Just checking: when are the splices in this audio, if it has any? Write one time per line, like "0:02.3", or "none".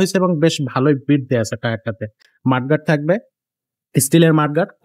none